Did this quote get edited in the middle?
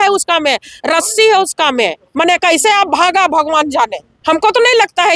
yes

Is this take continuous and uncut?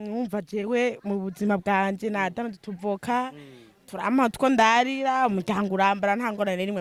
yes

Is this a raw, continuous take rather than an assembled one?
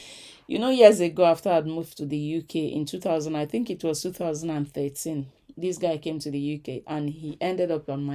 yes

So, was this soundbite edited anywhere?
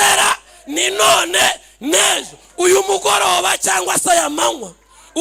no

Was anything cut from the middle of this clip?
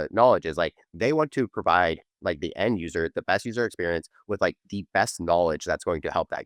no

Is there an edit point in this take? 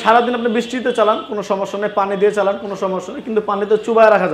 no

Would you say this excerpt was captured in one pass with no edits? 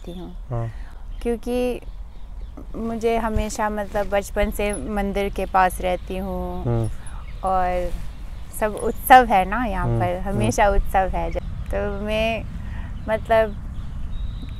yes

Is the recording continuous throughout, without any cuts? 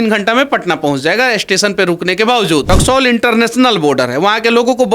no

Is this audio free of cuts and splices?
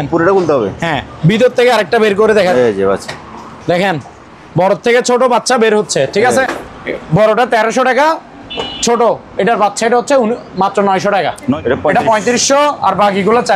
no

